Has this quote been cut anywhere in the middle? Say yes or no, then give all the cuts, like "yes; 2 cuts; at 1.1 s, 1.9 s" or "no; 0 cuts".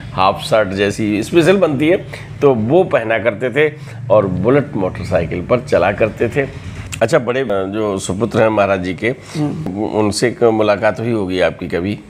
no; 0 cuts